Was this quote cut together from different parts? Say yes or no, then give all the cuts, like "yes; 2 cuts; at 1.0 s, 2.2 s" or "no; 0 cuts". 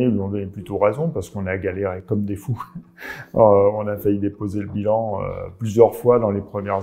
no; 0 cuts